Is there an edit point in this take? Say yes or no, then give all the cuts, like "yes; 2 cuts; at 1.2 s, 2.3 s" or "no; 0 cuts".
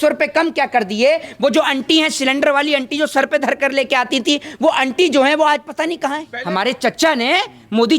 yes; 1 cut; at 6.3 s